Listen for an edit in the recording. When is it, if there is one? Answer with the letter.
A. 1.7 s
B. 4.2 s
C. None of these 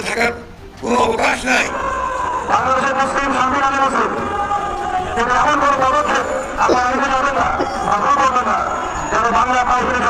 A